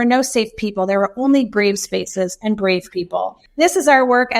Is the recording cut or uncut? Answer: cut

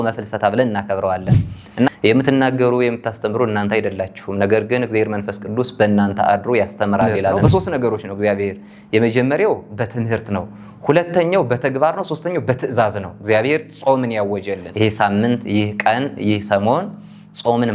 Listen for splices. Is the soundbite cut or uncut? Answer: cut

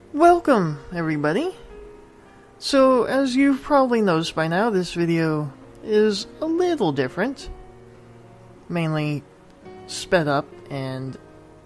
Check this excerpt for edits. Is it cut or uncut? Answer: uncut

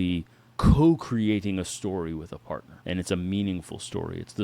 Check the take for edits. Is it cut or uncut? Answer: cut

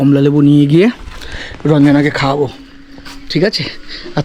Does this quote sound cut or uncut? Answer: uncut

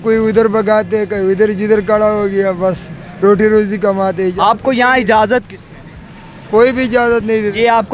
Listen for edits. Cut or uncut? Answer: uncut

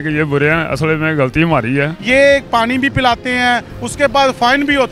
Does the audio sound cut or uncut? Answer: cut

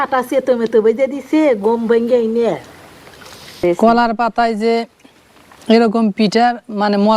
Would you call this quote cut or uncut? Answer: cut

